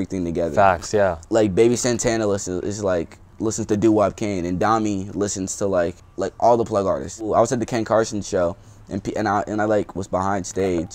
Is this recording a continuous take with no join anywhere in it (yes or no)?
no